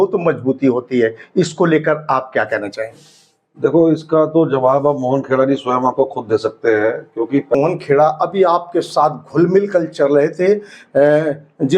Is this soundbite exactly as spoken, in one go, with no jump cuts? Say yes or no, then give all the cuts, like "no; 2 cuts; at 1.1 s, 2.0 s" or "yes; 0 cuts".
no; 1 cut; at 7.6 s